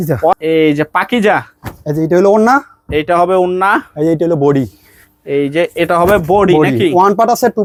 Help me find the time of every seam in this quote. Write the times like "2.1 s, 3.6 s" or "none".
none